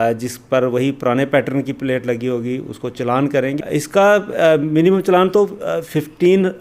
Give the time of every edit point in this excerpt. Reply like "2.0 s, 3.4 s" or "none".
3.6 s